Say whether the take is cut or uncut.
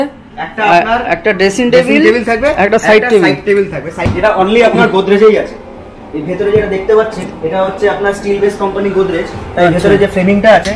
cut